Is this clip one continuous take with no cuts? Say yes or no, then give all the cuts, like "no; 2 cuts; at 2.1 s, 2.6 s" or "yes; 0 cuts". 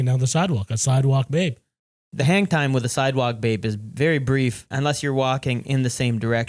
no; 2 cuts; at 2.0 s, 4.6 s